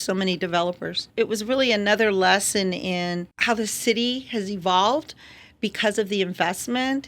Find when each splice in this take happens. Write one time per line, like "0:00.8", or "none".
0:01.0
0:03.3